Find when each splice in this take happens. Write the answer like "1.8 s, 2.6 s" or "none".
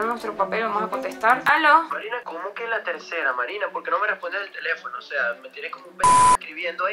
none